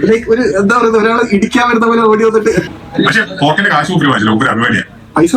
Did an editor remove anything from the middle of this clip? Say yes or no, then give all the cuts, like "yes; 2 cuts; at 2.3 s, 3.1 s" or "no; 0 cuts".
yes; 1 cut; at 2.7 s